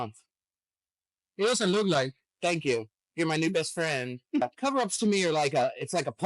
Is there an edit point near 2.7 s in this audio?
no; 1 cut; at 4.4 s

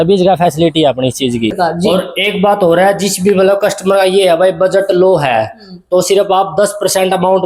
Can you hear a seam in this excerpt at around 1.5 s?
yes; 1 cut; at 1.5 s

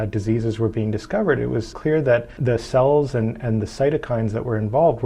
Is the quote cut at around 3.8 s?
no; 1 cut; at 1.9 s

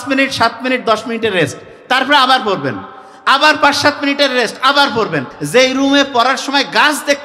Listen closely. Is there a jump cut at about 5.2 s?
yes; 1 cut; at 5.2 s

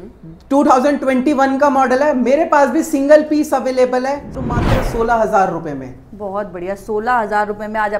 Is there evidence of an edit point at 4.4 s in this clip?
yes; 1 cut; at 4.4 s

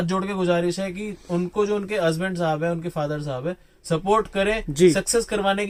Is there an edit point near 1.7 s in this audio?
no; 0 cuts

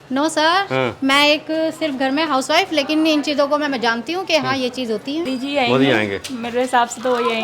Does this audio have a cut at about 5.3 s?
yes; 1 cut; at 5.3 s

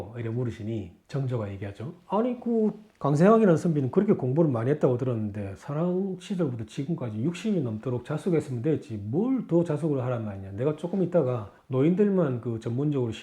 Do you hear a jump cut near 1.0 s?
yes; 1 cut; at 1.0 s

